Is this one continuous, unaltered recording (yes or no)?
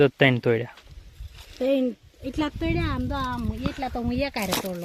yes